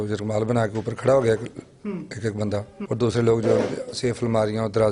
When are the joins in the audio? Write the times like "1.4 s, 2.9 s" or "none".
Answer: 2.8 s